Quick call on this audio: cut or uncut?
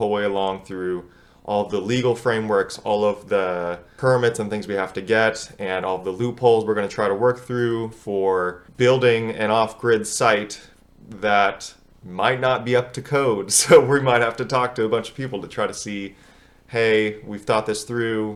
uncut